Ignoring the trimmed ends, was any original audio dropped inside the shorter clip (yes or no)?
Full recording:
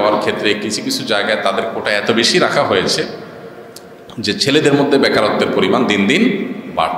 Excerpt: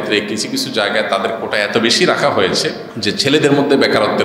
yes